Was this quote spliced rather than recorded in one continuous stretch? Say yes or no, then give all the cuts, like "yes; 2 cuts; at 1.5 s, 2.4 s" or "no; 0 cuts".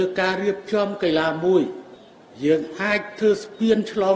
no; 0 cuts